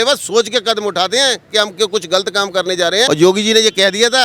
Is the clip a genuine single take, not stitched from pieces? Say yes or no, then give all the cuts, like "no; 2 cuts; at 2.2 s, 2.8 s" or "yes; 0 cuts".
no; 1 cut; at 3.1 s